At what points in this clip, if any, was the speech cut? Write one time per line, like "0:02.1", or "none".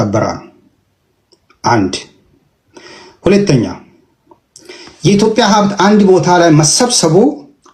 none